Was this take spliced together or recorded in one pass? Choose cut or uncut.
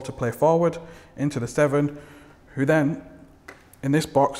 uncut